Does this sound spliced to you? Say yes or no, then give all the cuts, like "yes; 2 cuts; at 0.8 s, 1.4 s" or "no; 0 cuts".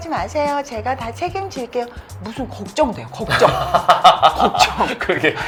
no; 0 cuts